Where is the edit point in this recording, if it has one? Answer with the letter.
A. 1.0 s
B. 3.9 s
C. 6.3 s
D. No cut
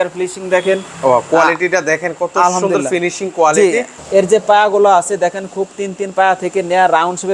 B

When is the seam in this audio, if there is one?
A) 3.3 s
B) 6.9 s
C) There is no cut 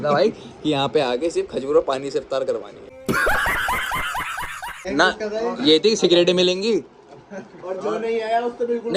C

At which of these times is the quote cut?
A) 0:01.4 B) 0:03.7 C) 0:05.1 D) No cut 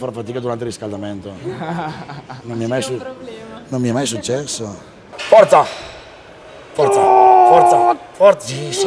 C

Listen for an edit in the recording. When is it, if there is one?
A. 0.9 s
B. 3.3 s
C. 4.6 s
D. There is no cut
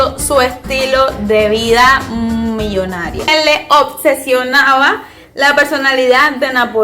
B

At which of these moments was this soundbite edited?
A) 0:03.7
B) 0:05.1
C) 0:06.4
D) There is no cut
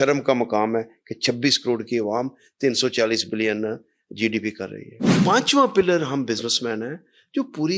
B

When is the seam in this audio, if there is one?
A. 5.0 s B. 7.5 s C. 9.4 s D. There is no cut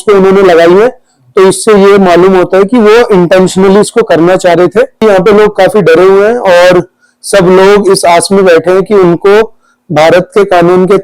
A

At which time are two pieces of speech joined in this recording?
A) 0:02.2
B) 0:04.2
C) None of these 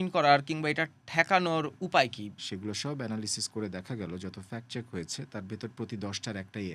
A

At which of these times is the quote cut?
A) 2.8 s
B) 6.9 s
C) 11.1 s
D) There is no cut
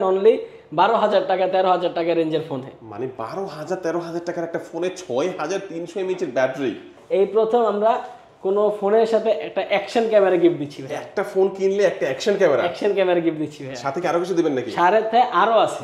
B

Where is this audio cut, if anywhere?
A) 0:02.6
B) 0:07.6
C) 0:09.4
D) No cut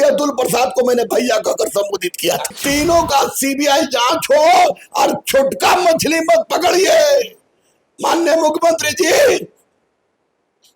A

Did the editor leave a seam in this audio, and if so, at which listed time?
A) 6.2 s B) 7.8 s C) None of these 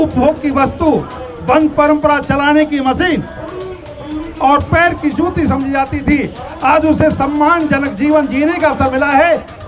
C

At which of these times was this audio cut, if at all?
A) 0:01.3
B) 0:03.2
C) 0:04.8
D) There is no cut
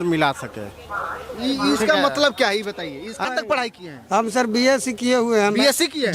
B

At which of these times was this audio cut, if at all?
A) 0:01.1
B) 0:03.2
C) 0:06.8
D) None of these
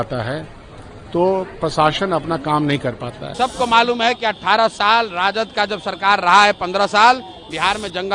B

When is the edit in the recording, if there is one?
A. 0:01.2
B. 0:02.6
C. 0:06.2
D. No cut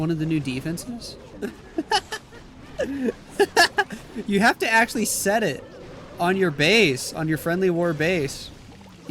A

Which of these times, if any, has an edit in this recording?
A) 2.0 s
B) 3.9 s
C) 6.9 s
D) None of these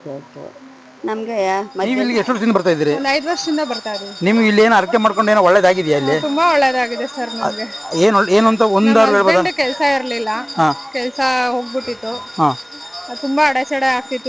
A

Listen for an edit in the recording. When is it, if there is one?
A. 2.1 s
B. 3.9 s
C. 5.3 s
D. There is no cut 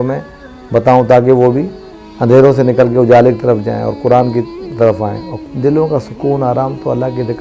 C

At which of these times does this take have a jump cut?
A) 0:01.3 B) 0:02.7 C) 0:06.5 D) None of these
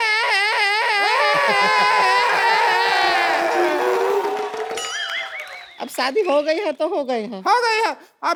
D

